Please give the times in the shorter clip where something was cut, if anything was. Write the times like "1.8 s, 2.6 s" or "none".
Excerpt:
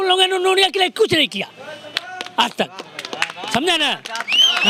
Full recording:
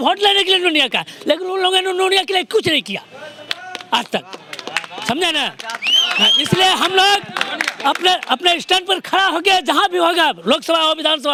none

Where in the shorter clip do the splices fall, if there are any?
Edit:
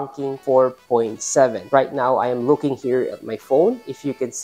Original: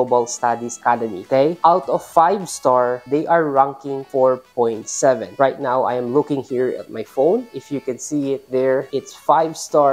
none

